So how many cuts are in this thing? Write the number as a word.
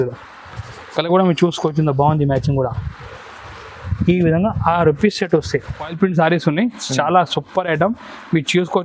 one